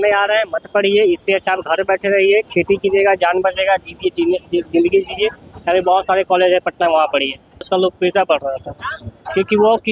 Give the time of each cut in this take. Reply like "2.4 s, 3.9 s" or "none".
7.6 s